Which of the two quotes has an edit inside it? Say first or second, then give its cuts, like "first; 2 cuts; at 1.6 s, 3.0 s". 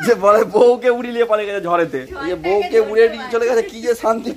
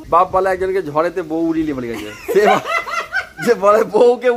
first; 1 cut; at 2.1 s